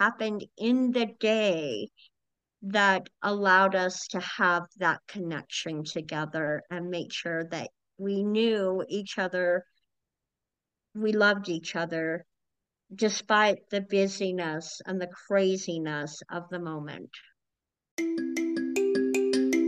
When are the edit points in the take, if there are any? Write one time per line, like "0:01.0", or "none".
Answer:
0:17.9

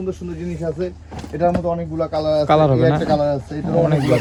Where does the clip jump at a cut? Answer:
none

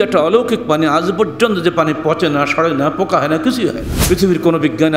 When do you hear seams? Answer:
0:03.9

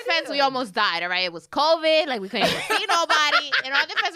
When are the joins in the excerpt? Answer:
none

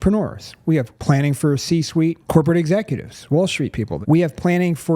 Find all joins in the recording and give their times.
0:00.9
0:02.2
0:03.9

